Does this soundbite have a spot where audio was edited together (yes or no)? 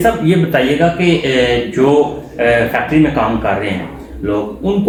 no